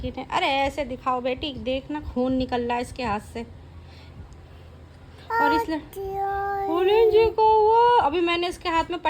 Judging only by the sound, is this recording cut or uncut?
uncut